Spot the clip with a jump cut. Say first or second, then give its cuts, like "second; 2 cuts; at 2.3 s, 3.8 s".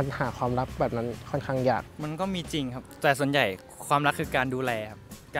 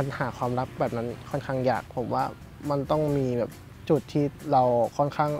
second; 1 cut; at 1.9 s